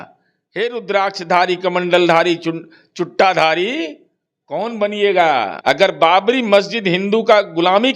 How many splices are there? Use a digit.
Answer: 1